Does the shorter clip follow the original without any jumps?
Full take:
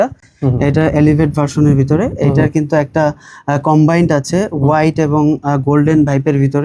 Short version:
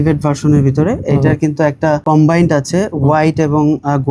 no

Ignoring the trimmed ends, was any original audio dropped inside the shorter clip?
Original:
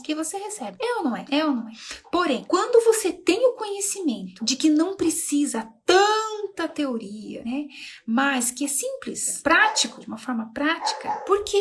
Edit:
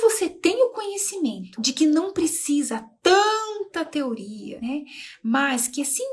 no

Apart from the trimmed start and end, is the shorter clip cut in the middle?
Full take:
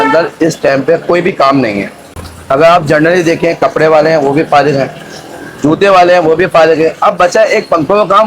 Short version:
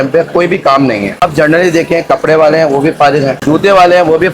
yes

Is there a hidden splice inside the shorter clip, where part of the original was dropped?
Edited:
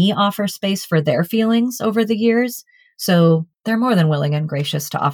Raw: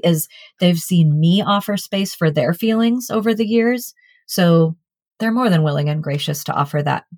yes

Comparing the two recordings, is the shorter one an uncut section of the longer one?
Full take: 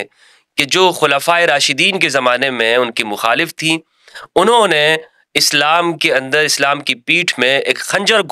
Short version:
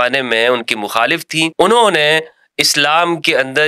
no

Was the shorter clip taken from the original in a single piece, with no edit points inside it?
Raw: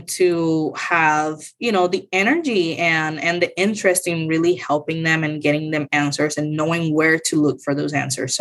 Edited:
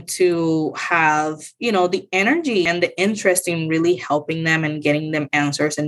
no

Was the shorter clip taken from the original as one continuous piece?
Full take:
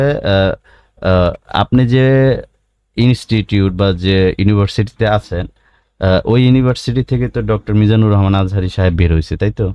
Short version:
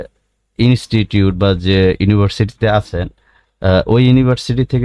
yes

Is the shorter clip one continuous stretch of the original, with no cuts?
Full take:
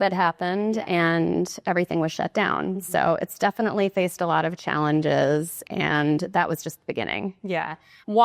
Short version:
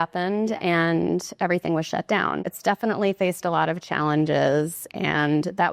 no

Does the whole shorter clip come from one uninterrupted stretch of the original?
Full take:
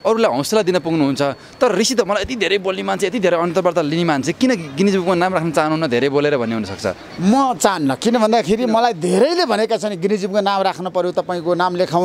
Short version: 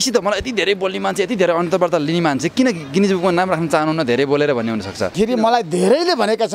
no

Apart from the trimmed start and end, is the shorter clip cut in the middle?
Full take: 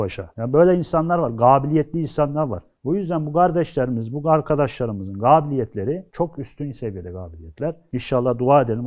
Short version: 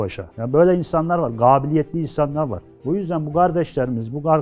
no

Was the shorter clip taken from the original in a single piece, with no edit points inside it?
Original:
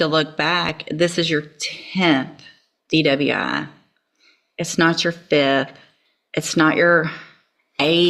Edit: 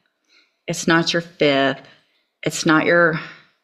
yes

